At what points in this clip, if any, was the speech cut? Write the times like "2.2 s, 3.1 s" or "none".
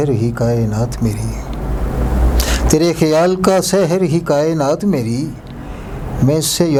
none